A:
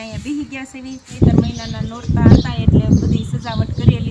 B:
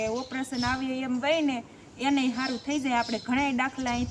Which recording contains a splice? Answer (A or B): A